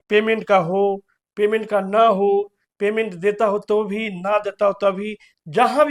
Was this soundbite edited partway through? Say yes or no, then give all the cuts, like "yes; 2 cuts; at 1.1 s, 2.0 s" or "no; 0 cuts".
no; 0 cuts